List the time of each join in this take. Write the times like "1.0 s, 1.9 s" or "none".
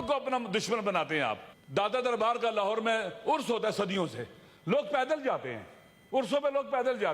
1.5 s

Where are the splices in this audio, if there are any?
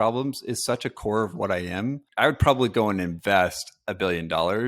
2.1 s

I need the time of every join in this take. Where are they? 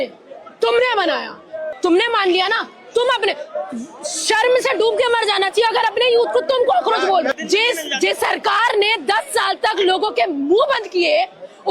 1.6 s, 7.3 s

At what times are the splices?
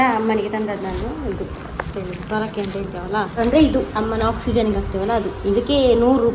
3.4 s

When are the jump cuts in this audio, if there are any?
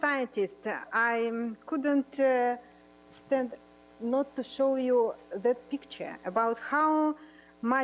6.7 s

